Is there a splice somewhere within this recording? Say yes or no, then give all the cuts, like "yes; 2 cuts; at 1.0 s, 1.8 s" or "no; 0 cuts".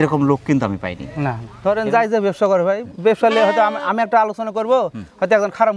yes; 1 cut; at 1.4 s